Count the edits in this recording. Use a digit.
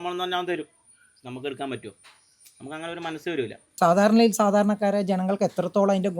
1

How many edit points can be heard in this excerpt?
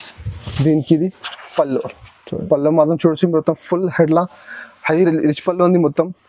0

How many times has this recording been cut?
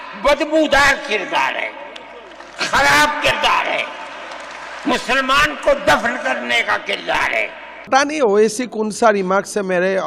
1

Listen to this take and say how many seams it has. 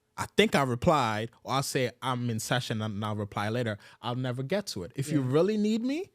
0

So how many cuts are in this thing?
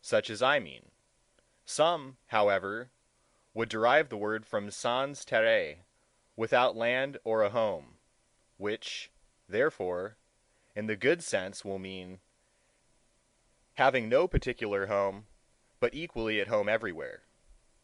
1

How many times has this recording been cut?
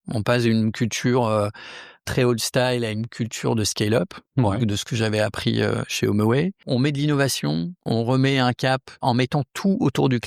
4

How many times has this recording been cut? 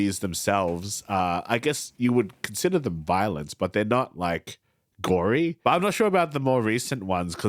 1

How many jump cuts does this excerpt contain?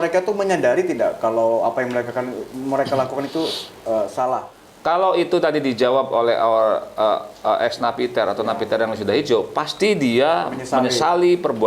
1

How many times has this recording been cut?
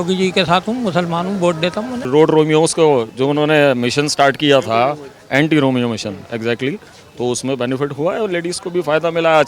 1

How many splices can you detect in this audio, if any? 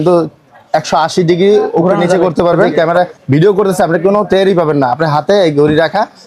1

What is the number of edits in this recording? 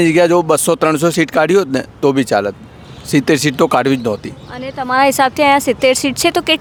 0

